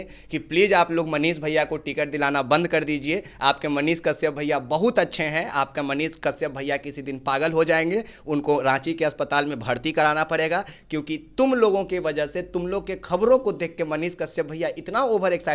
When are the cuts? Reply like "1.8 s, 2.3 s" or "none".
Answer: none

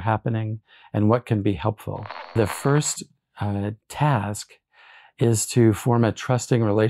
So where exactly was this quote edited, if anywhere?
2.4 s

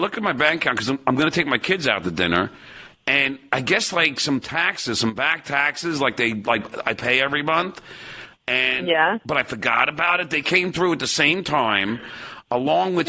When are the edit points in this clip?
none

